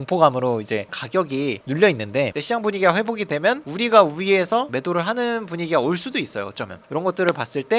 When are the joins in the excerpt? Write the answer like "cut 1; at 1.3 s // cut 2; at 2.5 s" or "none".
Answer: cut 1; at 2.4 s // cut 2; at 6.8 s